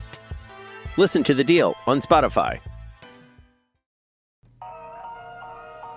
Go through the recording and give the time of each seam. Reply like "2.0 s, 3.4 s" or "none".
4.4 s